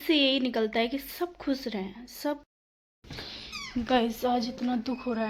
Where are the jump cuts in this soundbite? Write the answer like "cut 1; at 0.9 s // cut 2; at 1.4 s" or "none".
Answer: cut 1; at 2.4 s